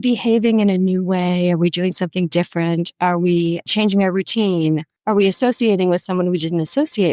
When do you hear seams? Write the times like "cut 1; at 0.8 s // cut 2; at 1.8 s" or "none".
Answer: cut 1; at 4.9 s